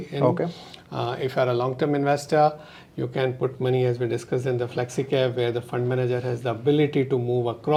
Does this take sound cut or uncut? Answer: uncut